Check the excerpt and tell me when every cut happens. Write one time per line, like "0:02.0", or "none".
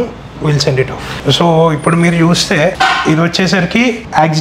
0:01.2